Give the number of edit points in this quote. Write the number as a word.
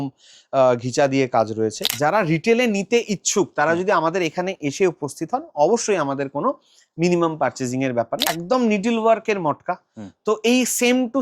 two